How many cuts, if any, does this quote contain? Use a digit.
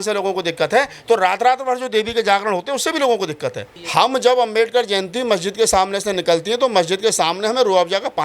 1